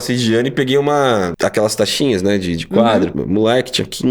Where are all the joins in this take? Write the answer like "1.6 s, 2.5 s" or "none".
1.3 s, 3.1 s